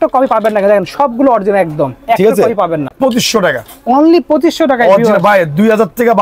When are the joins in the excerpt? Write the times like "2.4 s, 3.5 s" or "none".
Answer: 2.9 s